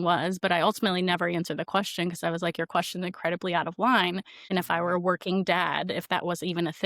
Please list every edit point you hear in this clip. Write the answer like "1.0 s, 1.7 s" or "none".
4.3 s